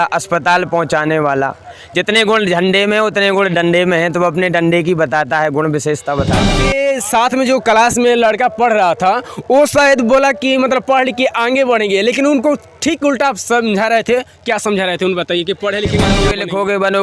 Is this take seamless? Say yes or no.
no